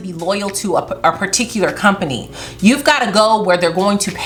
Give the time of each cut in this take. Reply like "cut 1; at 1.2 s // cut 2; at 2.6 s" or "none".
none

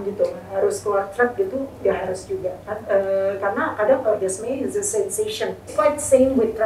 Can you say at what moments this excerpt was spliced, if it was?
none

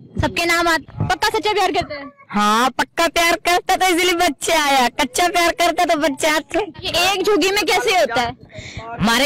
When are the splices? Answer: cut 1; at 0.9 s // cut 2; at 6.8 s

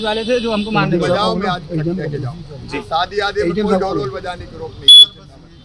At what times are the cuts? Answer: none

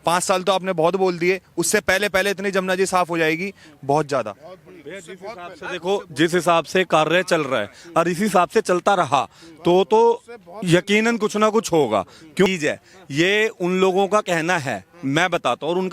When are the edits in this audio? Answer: cut 1; at 12.5 s

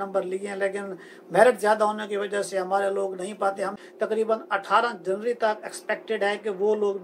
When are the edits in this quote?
cut 1; at 3.8 s

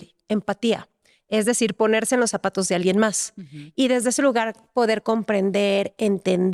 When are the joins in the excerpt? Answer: none

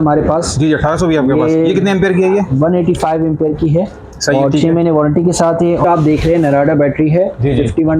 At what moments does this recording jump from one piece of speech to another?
cut 1; at 5.8 s

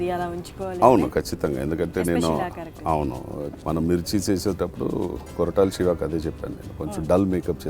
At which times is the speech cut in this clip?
cut 1; at 3.4 s

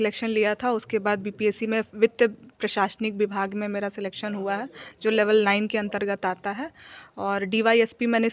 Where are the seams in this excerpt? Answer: none

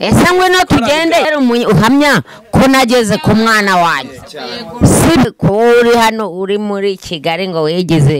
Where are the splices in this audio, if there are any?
cut 1; at 1.3 s // cut 2; at 5.2 s

